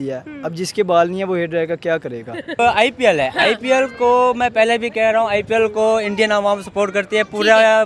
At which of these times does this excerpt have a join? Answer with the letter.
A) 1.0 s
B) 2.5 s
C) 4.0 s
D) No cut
B